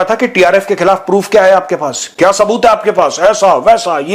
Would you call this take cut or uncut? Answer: uncut